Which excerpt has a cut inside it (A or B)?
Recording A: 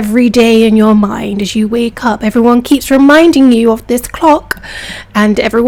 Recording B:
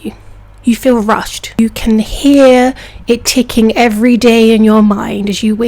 B